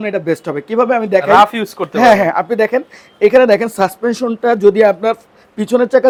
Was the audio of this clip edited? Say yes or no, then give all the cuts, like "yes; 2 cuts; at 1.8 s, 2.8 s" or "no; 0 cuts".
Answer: no; 0 cuts